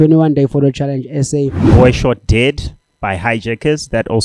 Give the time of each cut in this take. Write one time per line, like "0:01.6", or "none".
0:01.7

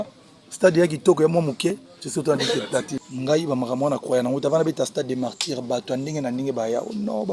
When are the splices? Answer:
0:03.0

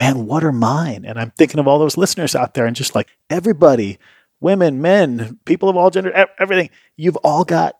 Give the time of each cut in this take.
0:03.2

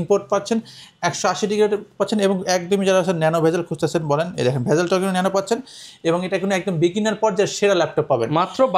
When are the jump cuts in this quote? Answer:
none

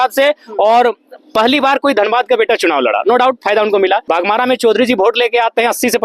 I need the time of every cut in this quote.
0:04.0

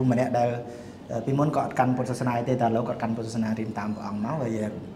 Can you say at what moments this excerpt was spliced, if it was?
none

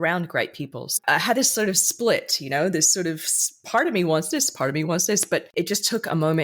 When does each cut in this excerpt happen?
0:01.0
0:05.5

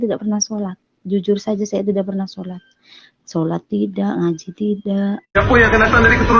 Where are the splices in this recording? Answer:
0:05.4

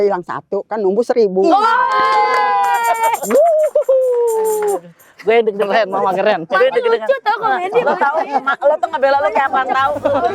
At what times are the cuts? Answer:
none

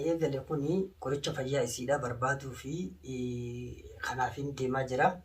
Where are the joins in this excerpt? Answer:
0:00.9

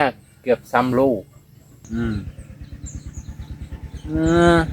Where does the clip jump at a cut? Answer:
0:01.8

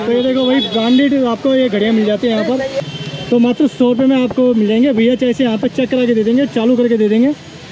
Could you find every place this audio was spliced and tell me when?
0:02.7

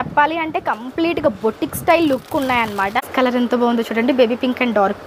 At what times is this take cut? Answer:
0:03.0

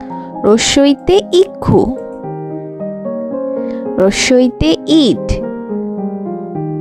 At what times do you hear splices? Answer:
none

